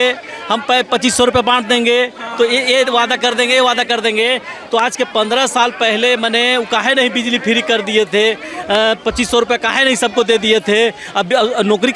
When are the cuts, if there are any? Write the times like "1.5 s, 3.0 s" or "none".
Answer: none